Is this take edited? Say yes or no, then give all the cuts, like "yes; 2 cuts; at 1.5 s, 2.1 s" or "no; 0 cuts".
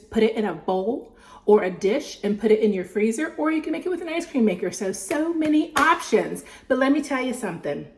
no; 0 cuts